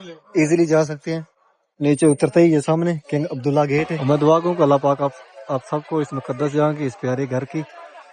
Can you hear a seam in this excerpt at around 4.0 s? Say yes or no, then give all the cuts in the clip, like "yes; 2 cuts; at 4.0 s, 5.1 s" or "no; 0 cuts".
yes; 1 cut; at 4.0 s